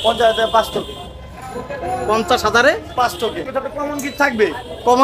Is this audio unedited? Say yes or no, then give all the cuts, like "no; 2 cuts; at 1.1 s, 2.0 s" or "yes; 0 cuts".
no; 1 cut; at 3.4 s